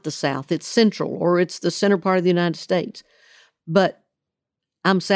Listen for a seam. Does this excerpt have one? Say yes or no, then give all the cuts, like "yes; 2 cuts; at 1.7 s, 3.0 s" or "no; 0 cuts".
no; 0 cuts